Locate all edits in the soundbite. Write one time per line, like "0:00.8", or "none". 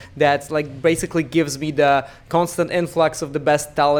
none